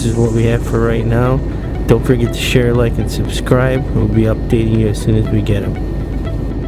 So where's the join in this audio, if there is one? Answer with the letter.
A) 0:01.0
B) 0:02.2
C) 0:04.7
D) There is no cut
C